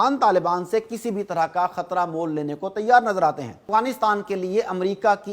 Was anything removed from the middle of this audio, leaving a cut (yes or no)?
yes